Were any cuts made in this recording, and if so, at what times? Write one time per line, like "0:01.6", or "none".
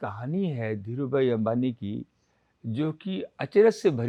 none